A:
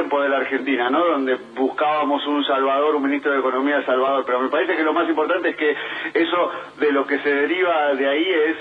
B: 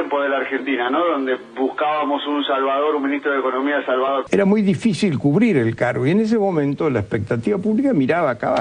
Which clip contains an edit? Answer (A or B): A